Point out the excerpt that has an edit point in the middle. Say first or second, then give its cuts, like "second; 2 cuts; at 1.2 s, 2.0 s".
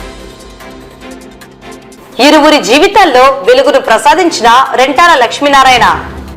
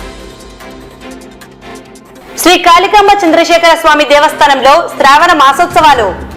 first; 1 cut; at 1.7 s